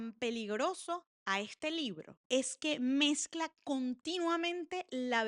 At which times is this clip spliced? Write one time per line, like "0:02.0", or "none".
none